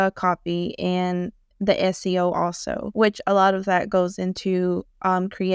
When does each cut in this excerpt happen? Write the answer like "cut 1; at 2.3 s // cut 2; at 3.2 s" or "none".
cut 1; at 2.8 s